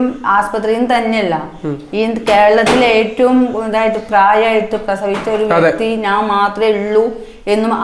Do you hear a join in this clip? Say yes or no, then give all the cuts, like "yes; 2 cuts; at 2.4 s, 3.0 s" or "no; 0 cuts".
no; 0 cuts